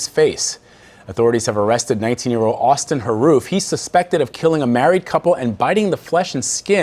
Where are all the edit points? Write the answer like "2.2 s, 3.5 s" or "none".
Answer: 1.5 s